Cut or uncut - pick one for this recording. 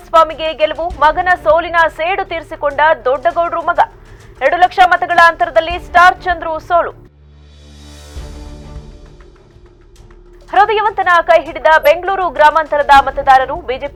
uncut